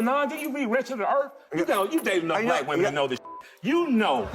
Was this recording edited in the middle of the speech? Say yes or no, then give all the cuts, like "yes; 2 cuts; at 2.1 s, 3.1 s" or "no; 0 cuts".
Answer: yes; 1 cut; at 1.4 s